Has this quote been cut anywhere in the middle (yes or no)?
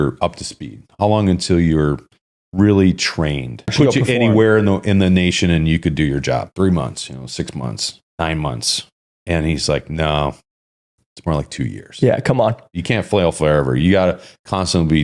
yes